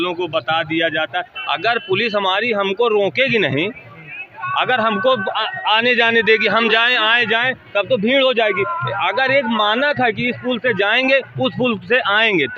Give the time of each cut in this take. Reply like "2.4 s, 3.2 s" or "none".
none